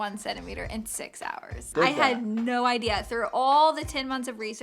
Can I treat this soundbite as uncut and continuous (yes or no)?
no